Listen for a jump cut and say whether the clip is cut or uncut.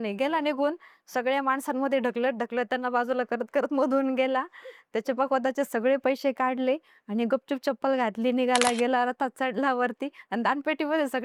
uncut